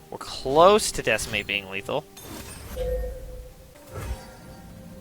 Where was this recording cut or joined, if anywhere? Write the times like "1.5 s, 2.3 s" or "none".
3.7 s